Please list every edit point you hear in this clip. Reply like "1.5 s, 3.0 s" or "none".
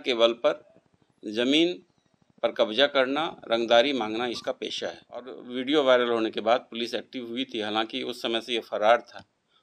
5.4 s